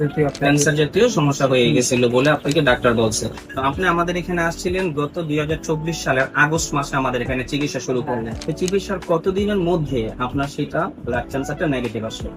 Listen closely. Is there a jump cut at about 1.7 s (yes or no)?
no